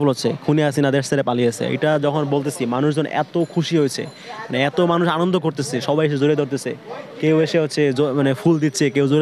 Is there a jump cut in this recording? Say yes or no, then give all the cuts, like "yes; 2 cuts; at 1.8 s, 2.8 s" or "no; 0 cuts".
no; 0 cuts